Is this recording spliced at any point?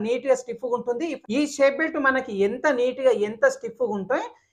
yes; 1 cut; at 1.2 s

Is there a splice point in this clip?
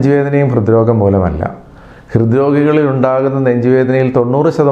no; 0 cuts

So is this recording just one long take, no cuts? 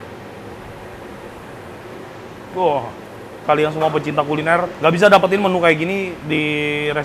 no; 3 cuts; at 3.4 s, 4.7 s, 6.2 s

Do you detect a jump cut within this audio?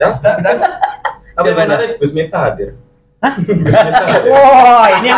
no; 0 cuts

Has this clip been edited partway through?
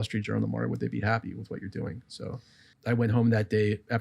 yes; 1 cut; at 2.7 s

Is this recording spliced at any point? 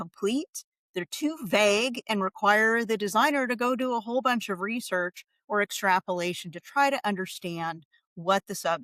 no; 0 cuts

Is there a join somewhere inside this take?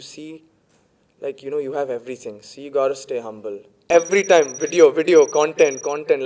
yes; 1 cut; at 3.8 s

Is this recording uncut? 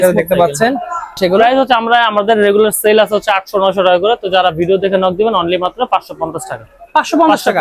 no; 1 cut; at 1.2 s

